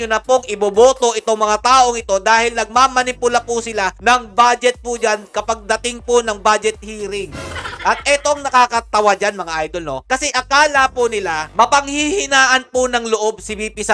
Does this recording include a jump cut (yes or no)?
no